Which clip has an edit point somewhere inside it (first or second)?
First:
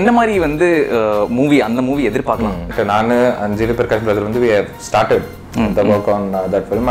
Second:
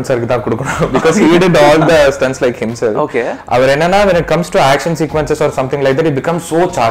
first